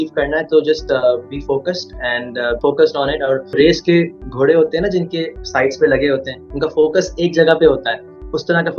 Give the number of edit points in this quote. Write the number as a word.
two